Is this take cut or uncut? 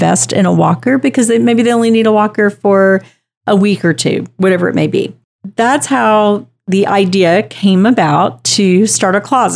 uncut